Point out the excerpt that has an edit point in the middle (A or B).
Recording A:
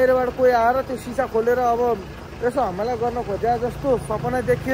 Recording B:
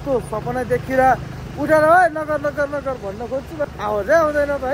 B